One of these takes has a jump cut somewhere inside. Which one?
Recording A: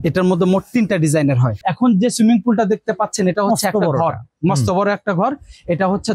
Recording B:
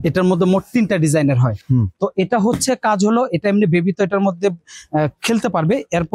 A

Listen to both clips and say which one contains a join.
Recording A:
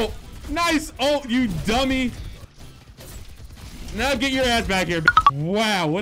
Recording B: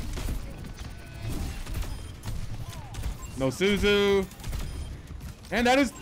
A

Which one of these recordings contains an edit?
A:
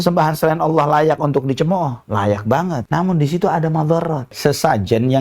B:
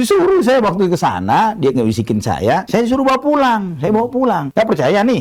A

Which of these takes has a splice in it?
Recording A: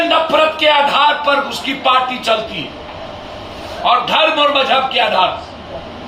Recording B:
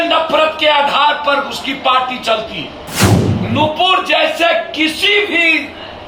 B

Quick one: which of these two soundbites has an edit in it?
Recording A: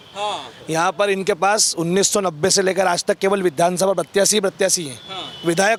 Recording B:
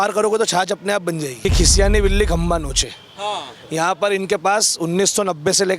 B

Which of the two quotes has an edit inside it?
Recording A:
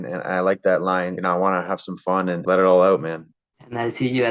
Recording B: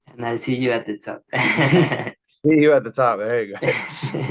A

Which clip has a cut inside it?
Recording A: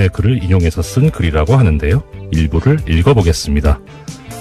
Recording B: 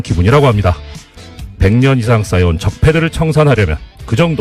B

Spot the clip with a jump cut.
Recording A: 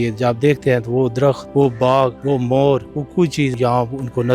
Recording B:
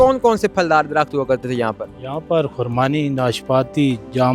A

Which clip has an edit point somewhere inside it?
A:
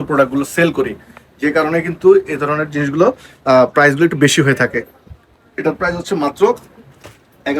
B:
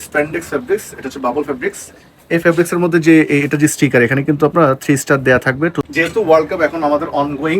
B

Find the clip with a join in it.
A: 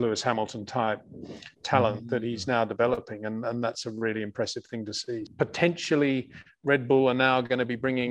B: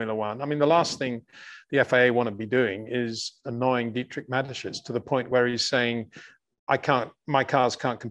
A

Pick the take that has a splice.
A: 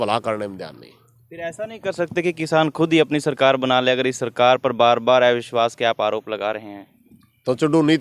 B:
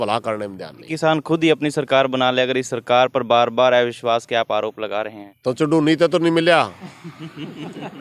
B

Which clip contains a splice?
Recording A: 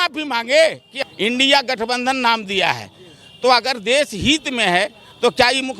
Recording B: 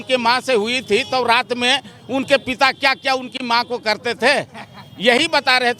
A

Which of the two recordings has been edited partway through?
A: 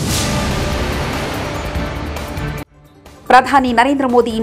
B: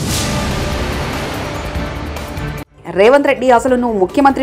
A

